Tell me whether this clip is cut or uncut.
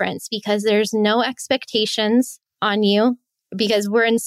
cut